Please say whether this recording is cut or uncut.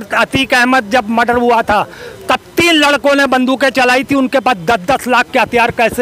uncut